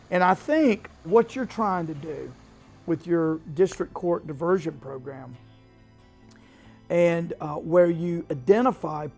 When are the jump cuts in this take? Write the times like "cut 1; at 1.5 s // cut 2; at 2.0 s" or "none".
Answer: cut 1; at 1.1 s